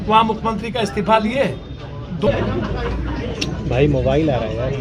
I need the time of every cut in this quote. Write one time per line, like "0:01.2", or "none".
0:02.3

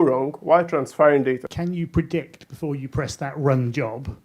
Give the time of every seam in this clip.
0:01.5

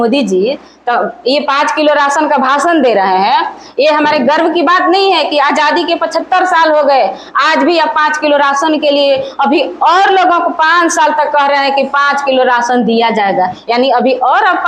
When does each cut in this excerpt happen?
none

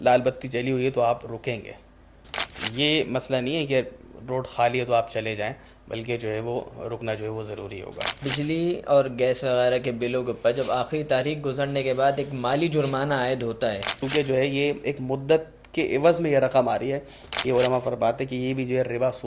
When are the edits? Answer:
0:02.4
0:08.2
0:14.0
0:17.3

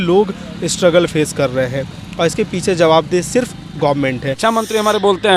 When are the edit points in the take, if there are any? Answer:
0:04.3

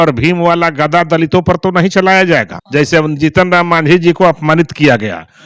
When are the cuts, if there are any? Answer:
0:02.6

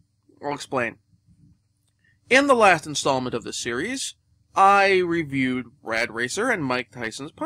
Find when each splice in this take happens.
0:04.6

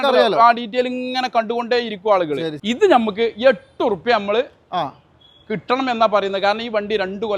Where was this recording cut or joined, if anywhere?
0:02.5

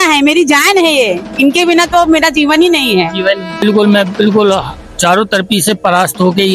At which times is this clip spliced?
0:03.6

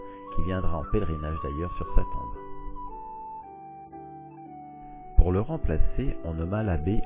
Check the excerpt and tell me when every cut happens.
0:01.7

